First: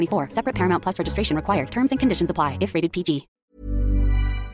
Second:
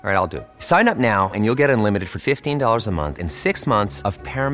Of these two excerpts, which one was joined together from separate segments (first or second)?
first